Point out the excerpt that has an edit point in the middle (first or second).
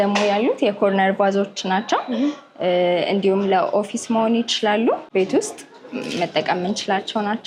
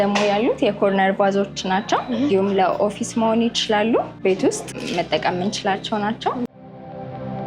second